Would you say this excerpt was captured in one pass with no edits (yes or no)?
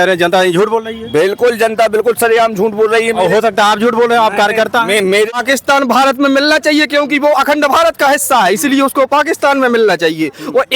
no